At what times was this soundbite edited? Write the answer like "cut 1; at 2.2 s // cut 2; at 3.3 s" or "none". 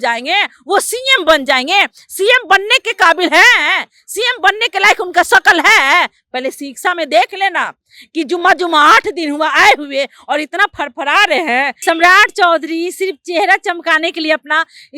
cut 1; at 11.7 s